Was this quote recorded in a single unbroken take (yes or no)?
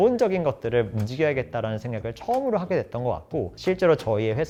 yes